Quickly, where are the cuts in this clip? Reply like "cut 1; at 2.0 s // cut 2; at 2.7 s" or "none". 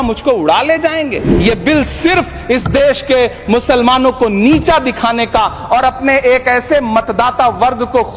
cut 1; at 1.3 s